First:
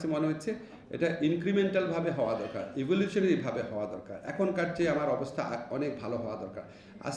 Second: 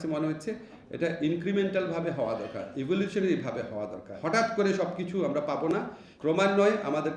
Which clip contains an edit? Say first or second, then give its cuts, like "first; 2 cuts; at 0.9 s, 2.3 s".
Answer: second; 2 cuts; at 4.1 s, 6.0 s